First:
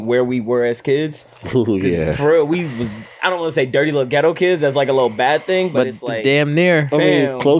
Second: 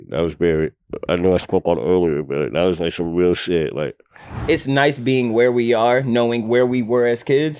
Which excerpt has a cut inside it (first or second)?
second